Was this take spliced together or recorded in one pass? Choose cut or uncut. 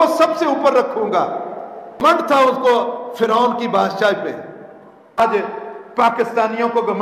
cut